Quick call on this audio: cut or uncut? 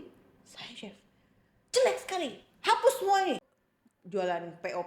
cut